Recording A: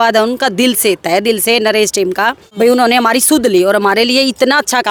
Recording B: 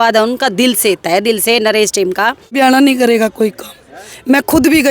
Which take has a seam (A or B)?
B